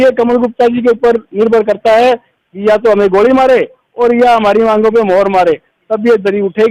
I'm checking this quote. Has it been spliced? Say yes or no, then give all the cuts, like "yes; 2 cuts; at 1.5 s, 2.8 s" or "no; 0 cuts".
no; 0 cuts